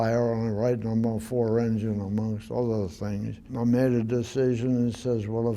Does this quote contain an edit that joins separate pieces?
yes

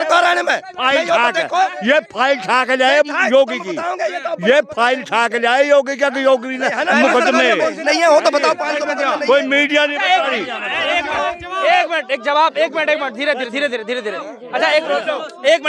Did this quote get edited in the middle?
no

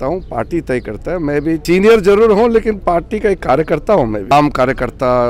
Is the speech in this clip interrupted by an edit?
yes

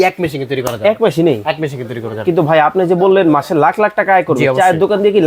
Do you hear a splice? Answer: no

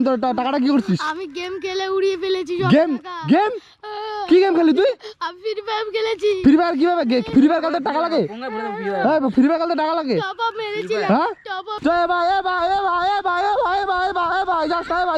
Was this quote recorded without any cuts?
no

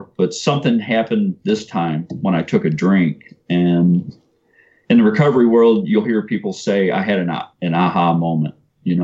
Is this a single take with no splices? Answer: no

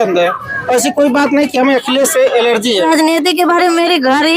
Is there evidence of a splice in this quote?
yes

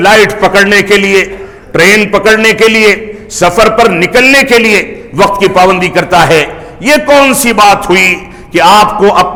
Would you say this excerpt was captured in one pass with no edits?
yes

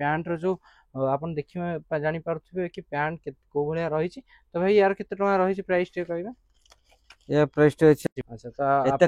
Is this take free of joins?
no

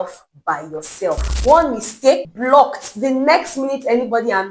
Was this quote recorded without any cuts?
no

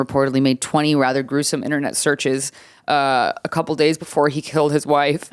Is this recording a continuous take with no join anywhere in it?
yes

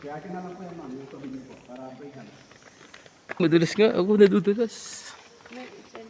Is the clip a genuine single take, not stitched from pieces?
no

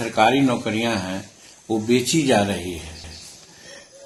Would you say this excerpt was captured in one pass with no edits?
yes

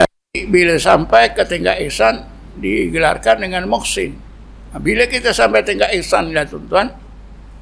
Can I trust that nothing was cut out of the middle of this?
yes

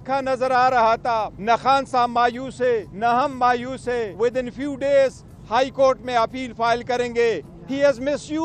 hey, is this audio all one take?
no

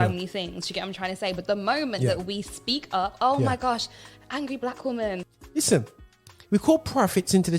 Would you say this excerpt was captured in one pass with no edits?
no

